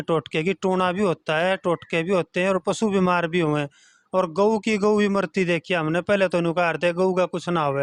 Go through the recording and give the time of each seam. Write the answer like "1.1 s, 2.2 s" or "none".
none